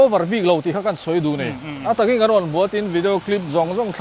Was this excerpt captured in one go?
yes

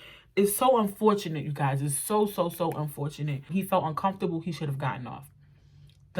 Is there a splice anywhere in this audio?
yes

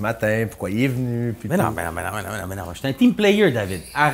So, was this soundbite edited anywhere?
no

